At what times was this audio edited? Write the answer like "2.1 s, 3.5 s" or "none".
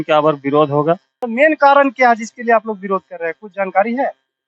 1.1 s